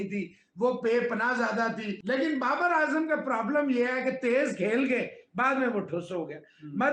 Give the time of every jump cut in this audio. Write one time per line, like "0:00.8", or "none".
0:01.9